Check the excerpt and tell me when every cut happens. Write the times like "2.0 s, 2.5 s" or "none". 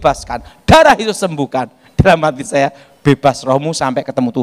none